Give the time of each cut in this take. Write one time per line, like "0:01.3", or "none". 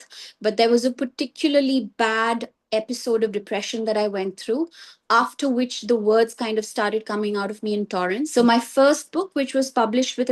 0:08.2